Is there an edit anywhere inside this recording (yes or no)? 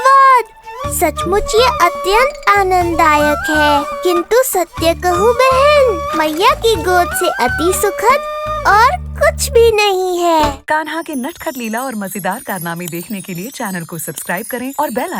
yes